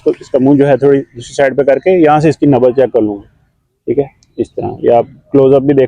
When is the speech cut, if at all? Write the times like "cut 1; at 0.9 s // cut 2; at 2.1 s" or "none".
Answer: none